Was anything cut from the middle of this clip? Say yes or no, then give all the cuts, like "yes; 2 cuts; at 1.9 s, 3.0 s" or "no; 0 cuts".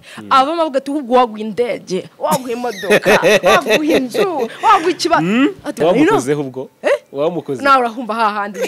yes; 1 cut; at 5.7 s